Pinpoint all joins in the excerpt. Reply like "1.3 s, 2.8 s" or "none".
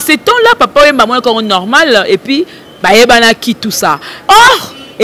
4.1 s

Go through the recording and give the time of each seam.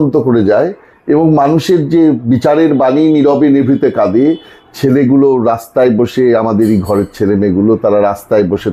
none

